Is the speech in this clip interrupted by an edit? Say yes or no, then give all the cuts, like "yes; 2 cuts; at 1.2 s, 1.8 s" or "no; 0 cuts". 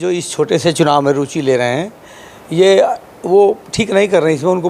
no; 0 cuts